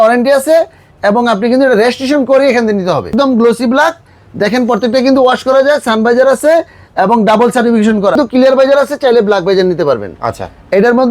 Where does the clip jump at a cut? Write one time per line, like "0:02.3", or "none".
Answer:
0:03.1
0:08.2

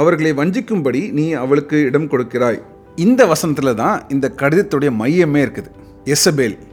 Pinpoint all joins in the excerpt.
none

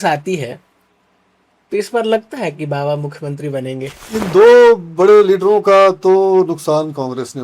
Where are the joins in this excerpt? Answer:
0:04.0

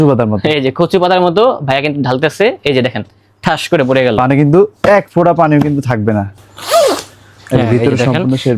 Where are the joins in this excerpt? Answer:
0:06.3

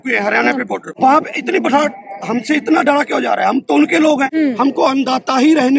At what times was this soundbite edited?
0:00.9
0:04.3

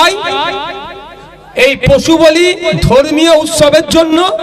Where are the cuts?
none

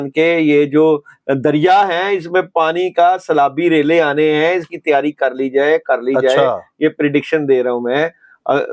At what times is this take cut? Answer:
none

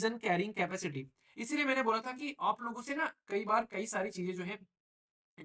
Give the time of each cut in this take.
none

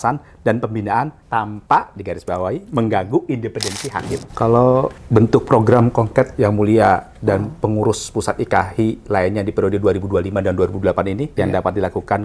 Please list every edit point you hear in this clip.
0:01.2
0:04.2
0:11.3

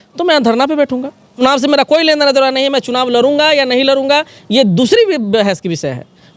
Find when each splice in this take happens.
0:01.4

